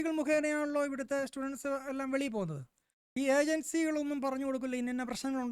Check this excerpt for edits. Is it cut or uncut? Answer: uncut